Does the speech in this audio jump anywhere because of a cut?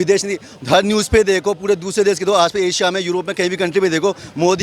no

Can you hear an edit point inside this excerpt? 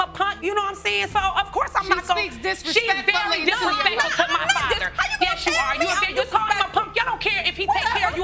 no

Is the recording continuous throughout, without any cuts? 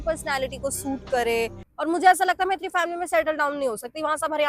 no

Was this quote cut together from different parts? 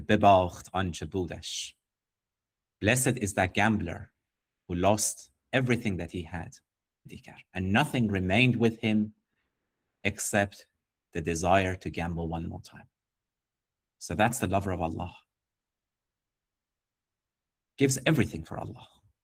no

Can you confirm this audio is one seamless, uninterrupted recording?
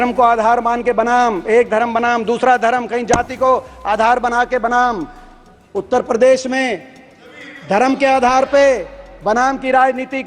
yes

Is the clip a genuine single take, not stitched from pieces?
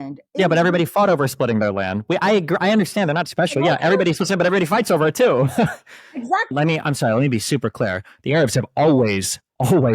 no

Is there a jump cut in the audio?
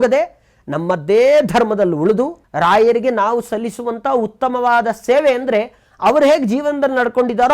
yes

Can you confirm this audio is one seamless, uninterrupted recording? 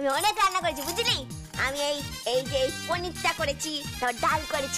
yes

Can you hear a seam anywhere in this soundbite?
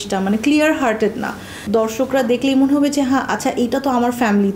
yes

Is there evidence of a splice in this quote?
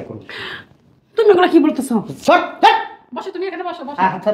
no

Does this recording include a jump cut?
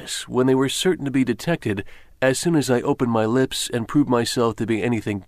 no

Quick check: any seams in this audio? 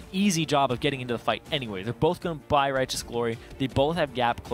no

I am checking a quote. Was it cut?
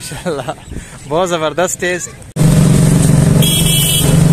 yes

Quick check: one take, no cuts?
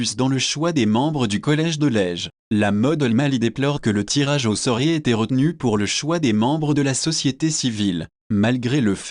no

